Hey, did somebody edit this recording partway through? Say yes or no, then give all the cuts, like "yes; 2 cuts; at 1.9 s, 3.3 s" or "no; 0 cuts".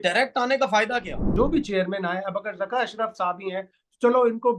yes; 1 cut; at 1.2 s